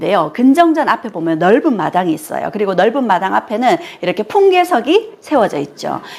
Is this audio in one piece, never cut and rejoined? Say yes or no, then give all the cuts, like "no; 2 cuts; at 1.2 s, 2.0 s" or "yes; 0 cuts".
yes; 0 cuts